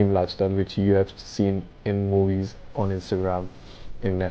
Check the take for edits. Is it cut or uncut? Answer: uncut